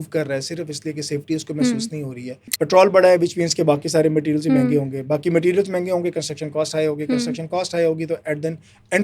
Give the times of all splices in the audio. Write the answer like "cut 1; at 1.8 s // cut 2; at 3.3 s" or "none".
cut 1; at 2.5 s